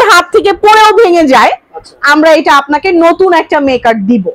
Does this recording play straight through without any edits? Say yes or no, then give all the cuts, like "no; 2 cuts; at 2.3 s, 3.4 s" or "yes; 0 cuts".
yes; 0 cuts